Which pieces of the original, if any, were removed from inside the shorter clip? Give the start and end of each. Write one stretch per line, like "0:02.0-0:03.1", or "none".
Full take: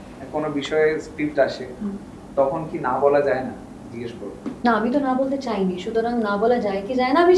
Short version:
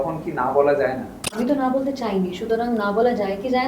0:03.9-0:04.9

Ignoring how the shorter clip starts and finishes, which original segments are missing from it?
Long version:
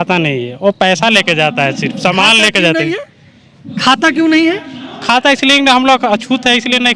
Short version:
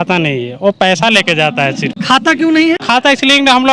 0:01.9-0:03.6
0:04.6-0:05.0

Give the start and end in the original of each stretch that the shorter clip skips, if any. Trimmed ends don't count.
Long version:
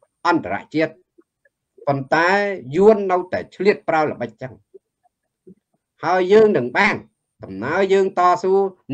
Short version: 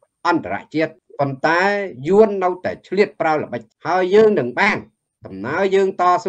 0:01.0-0:01.7
0:04.3-0:05.8

